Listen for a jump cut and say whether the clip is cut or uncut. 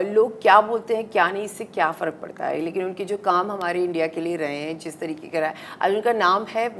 uncut